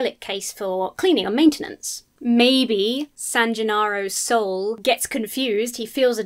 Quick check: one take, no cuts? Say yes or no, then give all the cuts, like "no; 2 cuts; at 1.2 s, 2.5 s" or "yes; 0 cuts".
no; 2 cuts; at 3.2 s, 4.8 s